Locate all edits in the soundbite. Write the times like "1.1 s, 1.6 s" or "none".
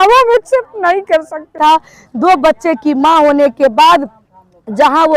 1.6 s